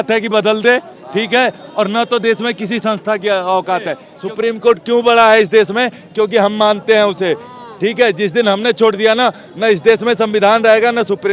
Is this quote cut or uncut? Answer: cut